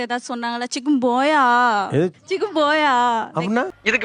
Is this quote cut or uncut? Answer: uncut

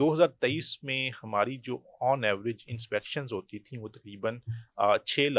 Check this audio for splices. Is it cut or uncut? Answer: uncut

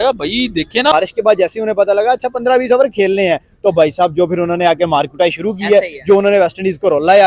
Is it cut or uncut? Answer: cut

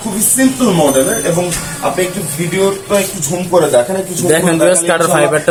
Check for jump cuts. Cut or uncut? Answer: uncut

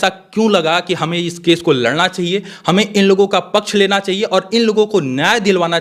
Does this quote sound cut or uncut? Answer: uncut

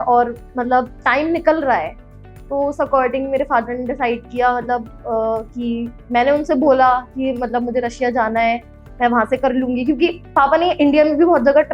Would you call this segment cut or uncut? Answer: uncut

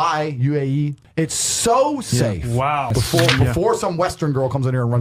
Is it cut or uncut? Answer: cut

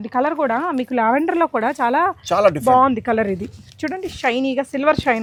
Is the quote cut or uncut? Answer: uncut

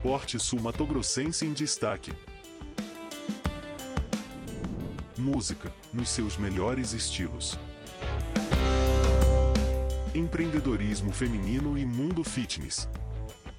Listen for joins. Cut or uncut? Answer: uncut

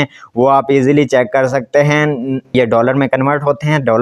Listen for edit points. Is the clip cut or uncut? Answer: cut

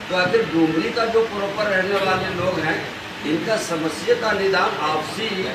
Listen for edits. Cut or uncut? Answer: uncut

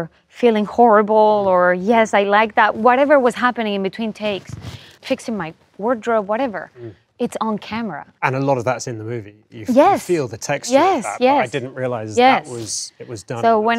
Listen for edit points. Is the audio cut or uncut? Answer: cut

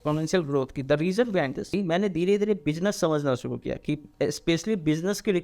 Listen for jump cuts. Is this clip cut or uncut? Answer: cut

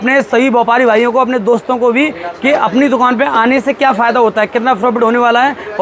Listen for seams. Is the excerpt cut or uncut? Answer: uncut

